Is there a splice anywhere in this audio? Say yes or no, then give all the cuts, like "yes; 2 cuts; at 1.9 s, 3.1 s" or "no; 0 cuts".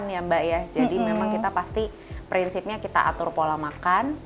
no; 0 cuts